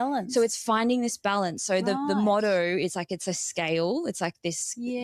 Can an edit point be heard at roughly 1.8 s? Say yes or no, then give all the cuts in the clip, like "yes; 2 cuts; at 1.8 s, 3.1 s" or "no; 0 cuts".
no; 0 cuts